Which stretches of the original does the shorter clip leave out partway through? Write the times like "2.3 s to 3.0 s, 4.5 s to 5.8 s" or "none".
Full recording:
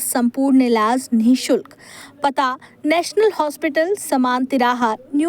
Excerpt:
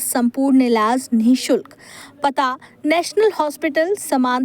none